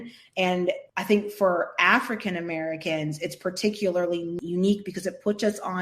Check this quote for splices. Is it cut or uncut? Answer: cut